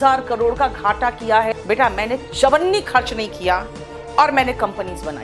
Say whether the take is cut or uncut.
cut